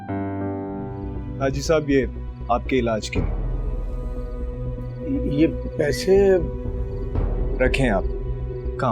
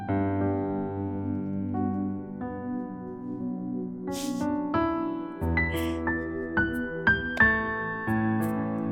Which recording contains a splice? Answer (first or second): first